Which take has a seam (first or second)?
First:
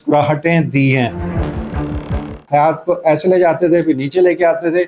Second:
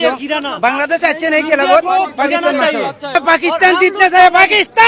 first